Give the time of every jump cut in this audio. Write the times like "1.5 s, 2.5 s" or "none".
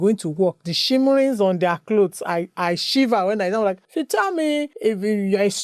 3.8 s, 4.7 s

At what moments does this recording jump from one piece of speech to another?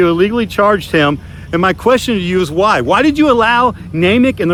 none

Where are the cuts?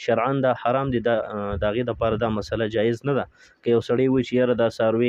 none

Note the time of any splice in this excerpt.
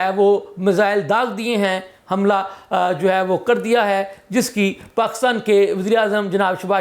none

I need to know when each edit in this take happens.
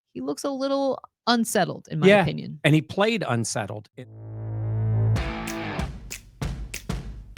3.8 s

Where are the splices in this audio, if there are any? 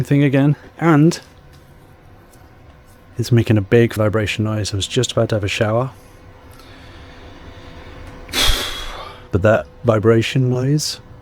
3.9 s, 9.2 s

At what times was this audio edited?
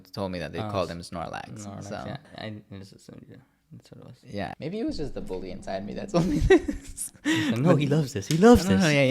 2.3 s, 4.5 s

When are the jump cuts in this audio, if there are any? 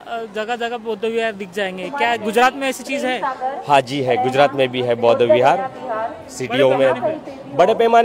none

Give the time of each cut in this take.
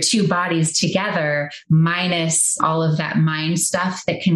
2.6 s

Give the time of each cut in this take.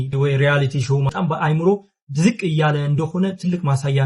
1.1 s

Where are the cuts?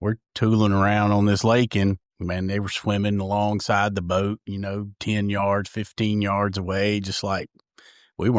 none

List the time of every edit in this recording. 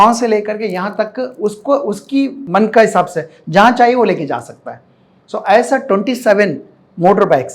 2.4 s

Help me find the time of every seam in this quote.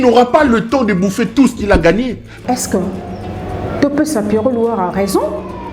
2.3 s

